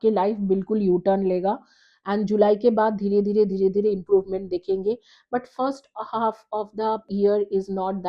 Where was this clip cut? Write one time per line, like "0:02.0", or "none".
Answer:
0:07.1